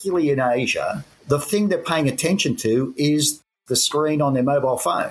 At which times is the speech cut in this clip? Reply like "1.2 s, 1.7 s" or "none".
1.1 s, 3.5 s